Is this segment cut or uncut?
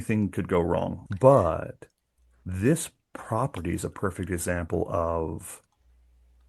cut